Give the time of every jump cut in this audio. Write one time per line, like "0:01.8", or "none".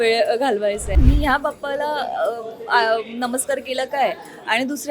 0:01.0

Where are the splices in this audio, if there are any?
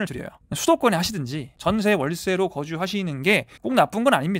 0:01.5

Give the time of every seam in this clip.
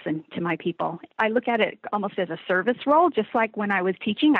0:01.0

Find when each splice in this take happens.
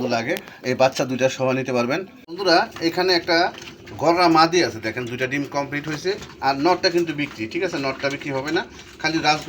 0:02.3

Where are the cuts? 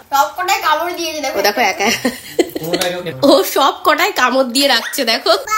0:03.1

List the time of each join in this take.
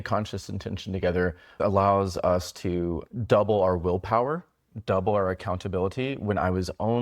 0:01.6
0:03.1

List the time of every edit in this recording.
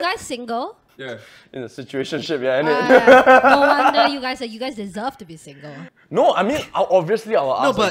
0:00.9
0:05.9

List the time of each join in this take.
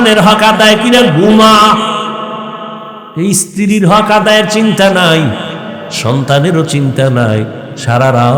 0:03.0

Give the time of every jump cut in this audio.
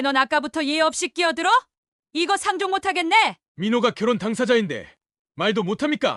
0:03.4

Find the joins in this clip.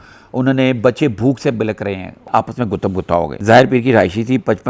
0:02.3
0:03.3

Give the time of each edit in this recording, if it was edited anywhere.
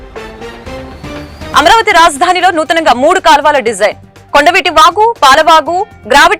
none

